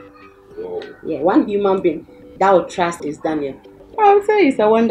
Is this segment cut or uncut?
uncut